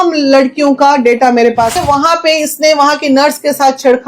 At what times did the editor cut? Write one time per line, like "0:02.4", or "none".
0:01.8